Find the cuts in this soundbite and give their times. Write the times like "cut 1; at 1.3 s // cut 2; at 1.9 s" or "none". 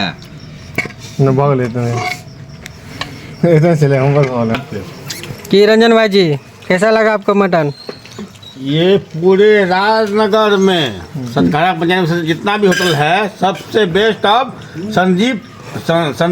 cut 1; at 4.5 s

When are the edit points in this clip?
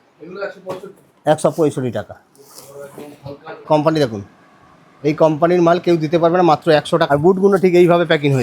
cut 1; at 3.7 s // cut 2; at 7.0 s

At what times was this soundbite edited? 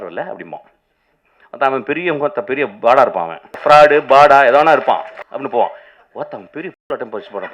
cut 1; at 3.5 s // cut 2; at 5.2 s

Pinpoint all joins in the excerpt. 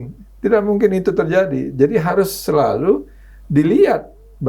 none

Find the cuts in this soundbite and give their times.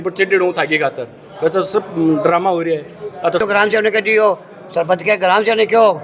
cut 1; at 3.4 s

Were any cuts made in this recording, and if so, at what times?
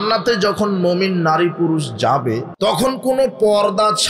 cut 1; at 2.5 s

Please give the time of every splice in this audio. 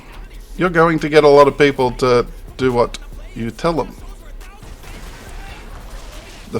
cut 1; at 4.6 s

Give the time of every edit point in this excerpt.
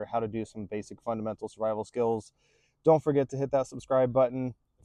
none

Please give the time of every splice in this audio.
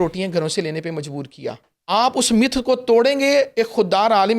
cut 1; at 1.7 s

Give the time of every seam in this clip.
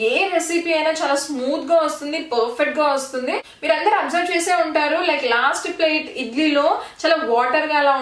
cut 1; at 3.5 s

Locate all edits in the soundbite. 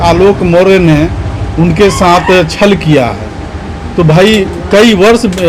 none

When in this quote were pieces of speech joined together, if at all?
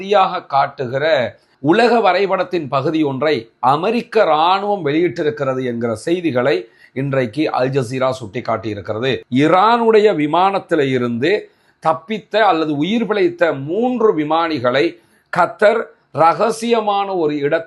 cut 1; at 9.2 s

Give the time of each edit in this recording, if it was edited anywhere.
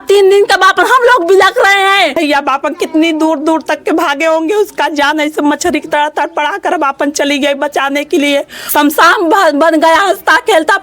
cut 1; at 2.1 s // cut 2; at 8.6 s

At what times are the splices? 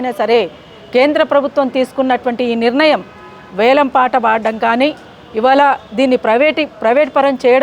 none

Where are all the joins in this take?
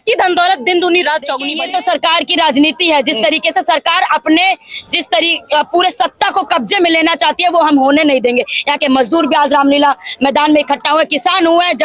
cut 1; at 1.5 s

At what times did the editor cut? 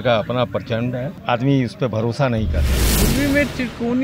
cut 1; at 1.1 s // cut 2; at 2.9 s

